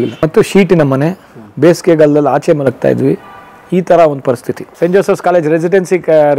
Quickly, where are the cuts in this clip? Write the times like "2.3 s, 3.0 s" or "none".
4.7 s